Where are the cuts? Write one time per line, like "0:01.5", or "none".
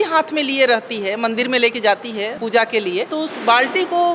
0:02.4
0:03.1